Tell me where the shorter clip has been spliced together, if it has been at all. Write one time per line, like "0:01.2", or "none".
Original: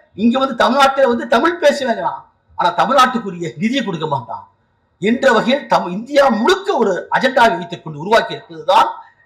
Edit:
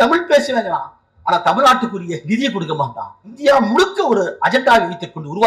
0:03.3